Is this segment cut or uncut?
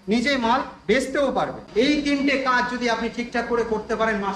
cut